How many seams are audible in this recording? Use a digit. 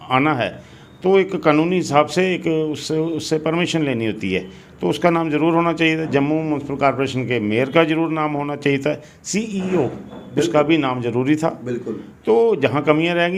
0